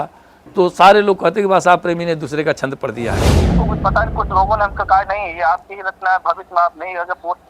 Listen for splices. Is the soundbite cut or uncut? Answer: cut